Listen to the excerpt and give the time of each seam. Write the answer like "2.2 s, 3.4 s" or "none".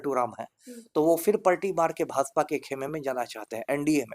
none